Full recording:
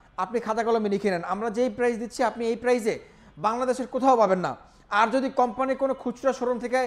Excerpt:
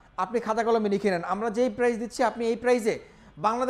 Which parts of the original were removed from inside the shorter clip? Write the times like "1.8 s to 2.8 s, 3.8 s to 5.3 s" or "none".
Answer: none

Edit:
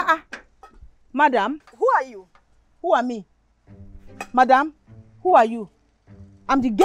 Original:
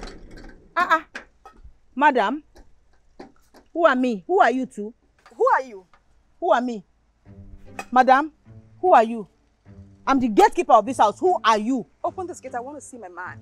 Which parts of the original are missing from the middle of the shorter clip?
2.5 s to 5.2 s

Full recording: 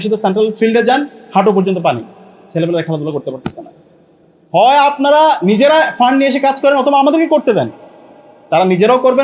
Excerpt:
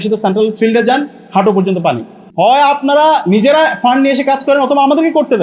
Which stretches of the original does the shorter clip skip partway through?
2.2 s to 4.3 s

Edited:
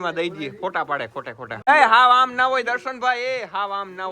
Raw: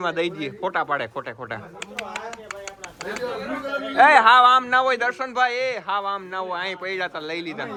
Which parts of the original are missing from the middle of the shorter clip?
1.7 s to 4.0 s

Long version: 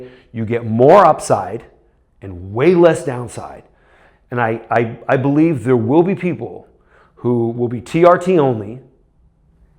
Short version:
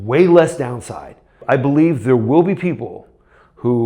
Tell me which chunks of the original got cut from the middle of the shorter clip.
3.8 s to 5.0 s

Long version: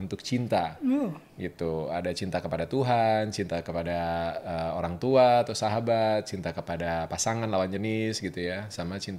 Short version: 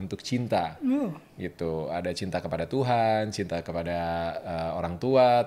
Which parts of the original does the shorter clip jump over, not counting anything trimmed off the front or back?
none

